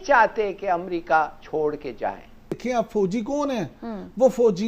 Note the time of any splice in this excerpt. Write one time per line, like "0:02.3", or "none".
0:02.6